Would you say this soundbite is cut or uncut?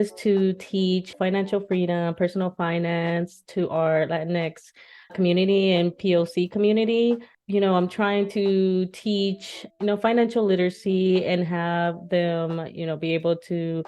cut